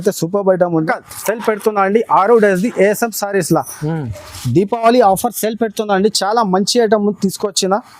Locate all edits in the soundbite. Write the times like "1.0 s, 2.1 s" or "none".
1.0 s